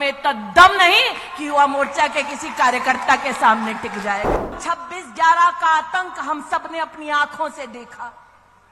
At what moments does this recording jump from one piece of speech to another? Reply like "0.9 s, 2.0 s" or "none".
4.6 s